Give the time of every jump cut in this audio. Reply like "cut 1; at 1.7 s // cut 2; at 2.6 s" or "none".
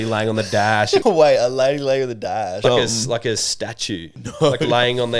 cut 1; at 1.0 s // cut 2; at 2.6 s // cut 3; at 4.1 s